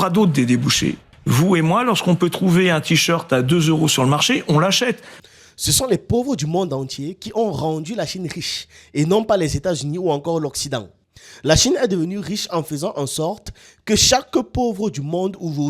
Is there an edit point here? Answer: yes; 3 cuts; at 1.1 s, 5.1 s, 10.9 s

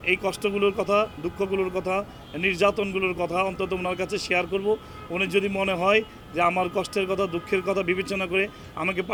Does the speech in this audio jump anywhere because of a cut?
no; 0 cuts

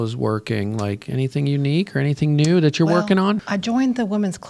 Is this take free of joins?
no; 1 cut; at 3.5 s

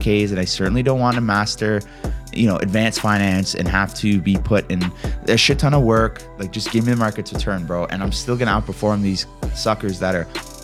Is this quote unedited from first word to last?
no; 1 cut; at 9.5 s

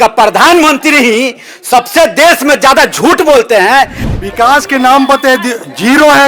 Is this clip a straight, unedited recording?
no; 1 cut; at 4.0 s

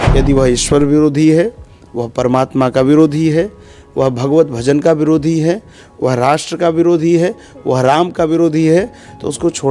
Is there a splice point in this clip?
no; 0 cuts

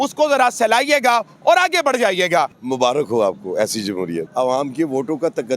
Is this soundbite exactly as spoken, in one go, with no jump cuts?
no; 2 cuts; at 2.6 s, 4.3 s

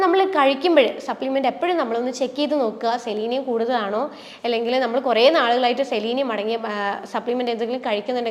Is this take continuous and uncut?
yes; 0 cuts

